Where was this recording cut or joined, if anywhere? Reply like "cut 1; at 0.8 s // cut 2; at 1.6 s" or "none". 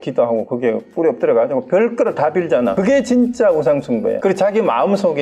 cut 1; at 2.8 s // cut 2; at 4.2 s